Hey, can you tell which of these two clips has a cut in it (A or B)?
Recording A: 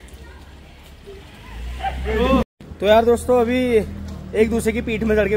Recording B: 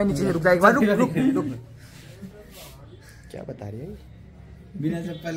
A